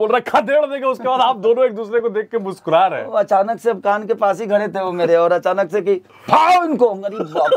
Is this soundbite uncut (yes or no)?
yes